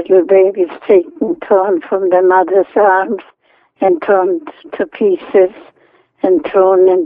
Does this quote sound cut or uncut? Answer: uncut